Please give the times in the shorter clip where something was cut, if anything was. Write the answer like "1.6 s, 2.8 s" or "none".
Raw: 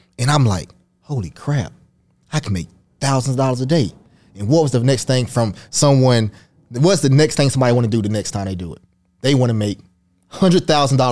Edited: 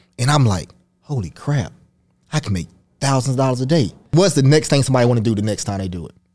4.0 s